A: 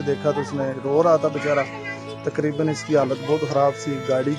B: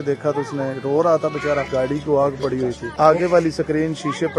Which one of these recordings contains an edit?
B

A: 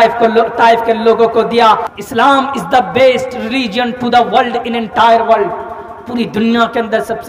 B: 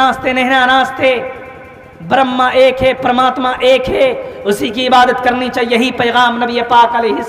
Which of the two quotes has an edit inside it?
A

